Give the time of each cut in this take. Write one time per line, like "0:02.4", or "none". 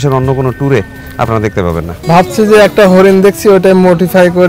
0:01.9